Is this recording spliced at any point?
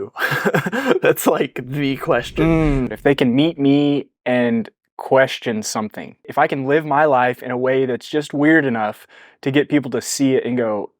yes; 2 cuts; at 2.9 s, 6.3 s

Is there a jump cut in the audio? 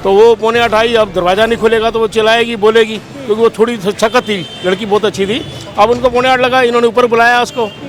no; 0 cuts

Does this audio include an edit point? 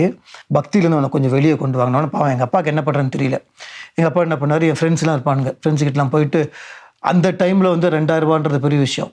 no; 0 cuts

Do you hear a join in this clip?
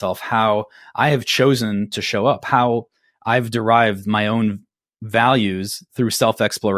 no; 0 cuts

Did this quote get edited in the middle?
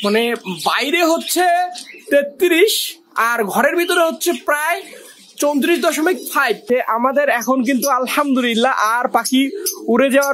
yes; 1 cut; at 6.6 s

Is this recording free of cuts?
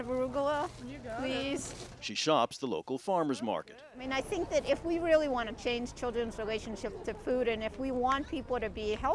yes; 0 cuts

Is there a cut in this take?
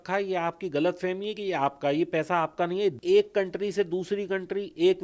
yes; 1 cut; at 3.0 s

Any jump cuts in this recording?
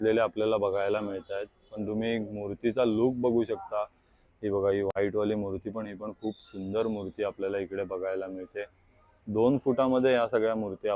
no; 0 cuts

